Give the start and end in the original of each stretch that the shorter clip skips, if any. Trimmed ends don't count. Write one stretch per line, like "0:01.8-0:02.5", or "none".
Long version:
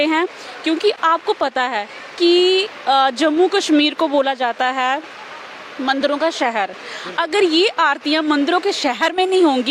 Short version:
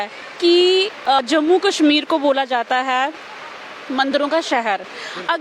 0:02.9-0:03.0